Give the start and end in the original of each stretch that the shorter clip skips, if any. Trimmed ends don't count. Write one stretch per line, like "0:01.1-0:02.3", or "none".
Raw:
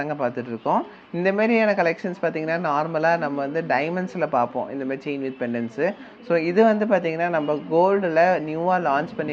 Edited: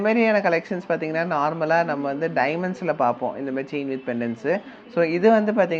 none